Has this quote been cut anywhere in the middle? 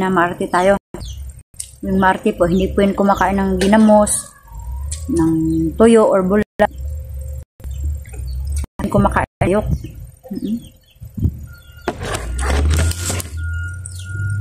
no; 0 cuts

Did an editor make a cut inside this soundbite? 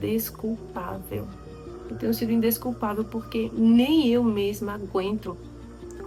no; 0 cuts

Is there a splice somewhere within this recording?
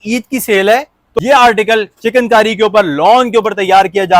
yes; 1 cut; at 1.2 s

